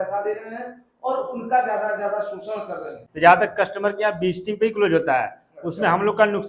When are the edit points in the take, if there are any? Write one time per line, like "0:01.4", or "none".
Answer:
0:03.0